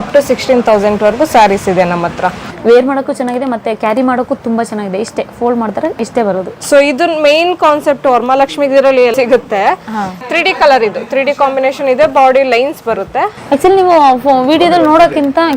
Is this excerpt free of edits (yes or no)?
no